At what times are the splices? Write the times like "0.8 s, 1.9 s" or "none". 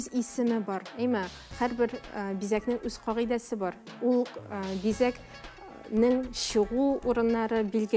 none